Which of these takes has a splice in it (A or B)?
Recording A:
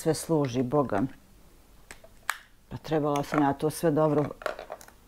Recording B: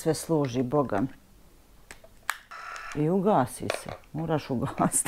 B